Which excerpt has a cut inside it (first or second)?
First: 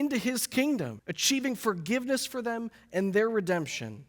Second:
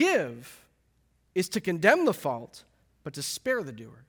first